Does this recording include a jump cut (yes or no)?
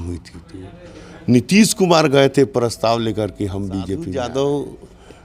yes